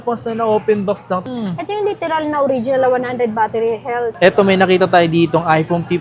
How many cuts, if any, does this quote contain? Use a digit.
2